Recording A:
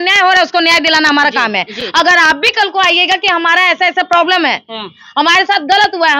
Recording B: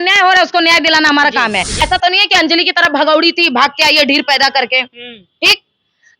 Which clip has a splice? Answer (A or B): B